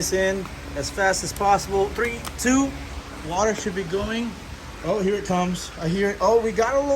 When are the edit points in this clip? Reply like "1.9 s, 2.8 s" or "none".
none